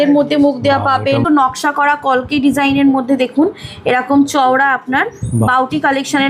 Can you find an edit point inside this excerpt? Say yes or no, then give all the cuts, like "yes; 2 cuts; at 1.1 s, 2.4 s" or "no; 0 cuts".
yes; 1 cut; at 1.2 s